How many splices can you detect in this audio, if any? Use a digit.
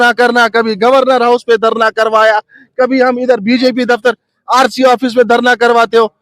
1